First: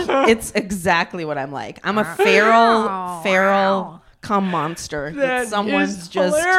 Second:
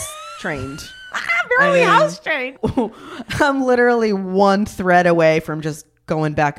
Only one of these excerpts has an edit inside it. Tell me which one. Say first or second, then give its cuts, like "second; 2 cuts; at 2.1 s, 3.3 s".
second; 1 cut; at 2.5 s